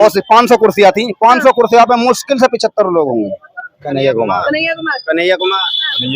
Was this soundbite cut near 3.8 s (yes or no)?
yes